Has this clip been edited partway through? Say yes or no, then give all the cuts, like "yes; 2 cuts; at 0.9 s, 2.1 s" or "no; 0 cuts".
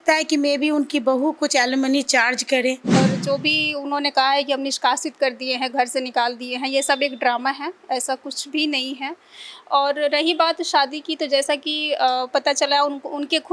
yes; 1 cut; at 2.9 s